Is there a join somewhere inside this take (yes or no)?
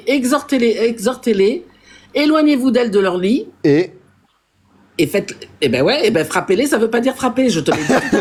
no